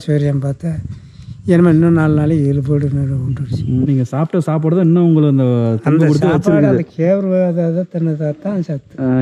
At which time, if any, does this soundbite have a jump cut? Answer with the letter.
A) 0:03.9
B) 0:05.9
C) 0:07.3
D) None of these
A